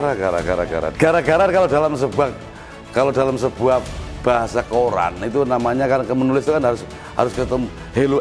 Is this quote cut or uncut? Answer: uncut